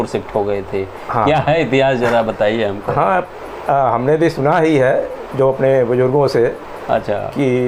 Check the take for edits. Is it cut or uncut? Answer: uncut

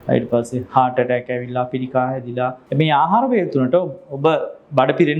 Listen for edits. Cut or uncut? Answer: cut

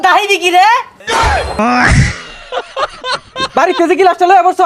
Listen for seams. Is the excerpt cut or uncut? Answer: cut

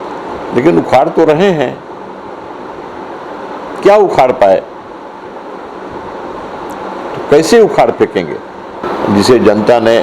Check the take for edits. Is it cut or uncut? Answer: cut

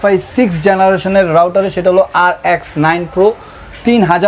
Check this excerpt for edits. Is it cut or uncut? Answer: uncut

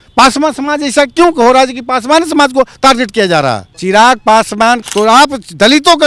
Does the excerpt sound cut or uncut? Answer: cut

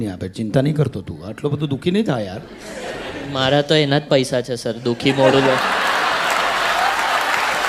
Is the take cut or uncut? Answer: uncut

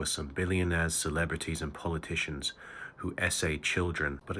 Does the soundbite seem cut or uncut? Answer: uncut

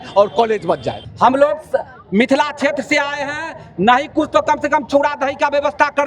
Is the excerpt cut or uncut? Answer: cut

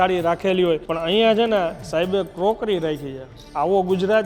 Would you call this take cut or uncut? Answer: cut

